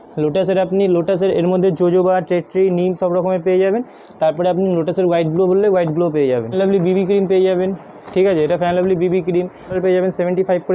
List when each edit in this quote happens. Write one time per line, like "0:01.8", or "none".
0:06.5
0:09.7